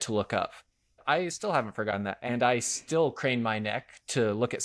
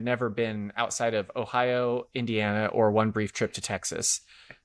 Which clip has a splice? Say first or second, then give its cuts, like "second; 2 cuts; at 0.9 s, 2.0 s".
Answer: first; 2 cuts; at 0.9 s, 2.2 s